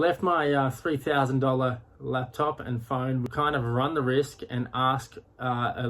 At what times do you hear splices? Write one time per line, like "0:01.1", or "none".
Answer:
0:03.2